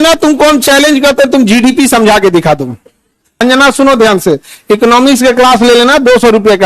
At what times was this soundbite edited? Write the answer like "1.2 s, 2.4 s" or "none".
3.4 s

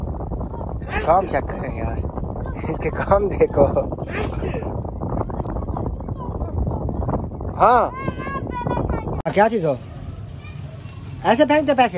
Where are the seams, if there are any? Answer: 9.3 s

